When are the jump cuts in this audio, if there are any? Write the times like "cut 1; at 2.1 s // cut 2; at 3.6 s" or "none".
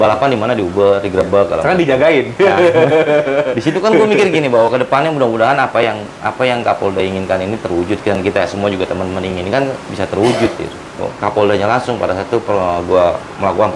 cut 1; at 11.1 s